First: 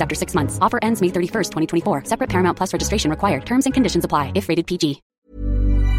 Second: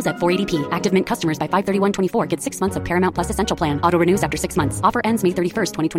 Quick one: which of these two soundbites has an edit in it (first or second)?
first